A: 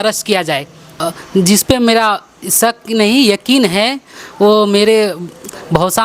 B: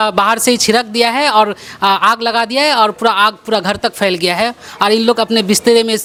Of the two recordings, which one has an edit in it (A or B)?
A